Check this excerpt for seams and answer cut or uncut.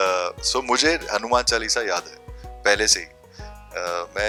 uncut